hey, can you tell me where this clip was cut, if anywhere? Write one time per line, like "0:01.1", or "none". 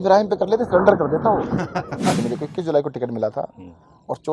0:02.2